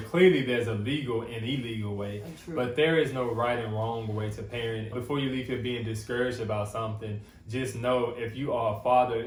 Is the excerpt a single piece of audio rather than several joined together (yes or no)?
yes